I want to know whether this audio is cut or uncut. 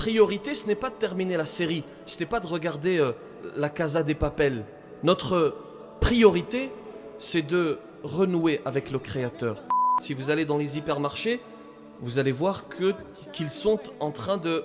cut